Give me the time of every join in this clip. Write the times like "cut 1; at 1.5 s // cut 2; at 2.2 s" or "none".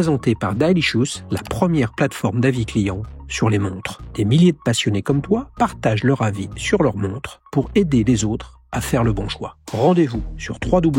none